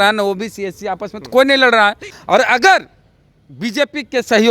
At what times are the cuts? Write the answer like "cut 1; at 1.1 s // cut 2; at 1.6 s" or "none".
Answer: cut 1; at 2.1 s

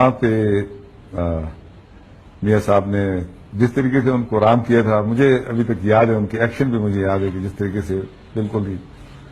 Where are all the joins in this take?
cut 1; at 1.2 s

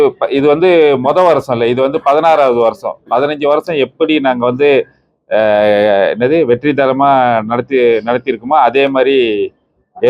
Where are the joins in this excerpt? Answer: none

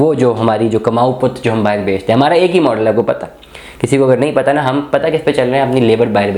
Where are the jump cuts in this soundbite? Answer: none

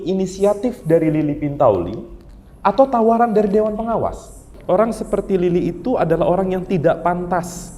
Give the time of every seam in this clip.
cut 1; at 4.5 s

